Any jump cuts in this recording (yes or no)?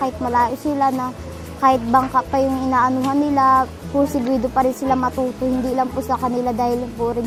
no